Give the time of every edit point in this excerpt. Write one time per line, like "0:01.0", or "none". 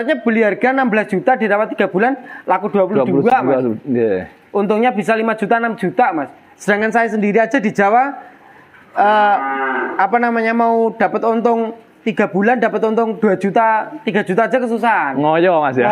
none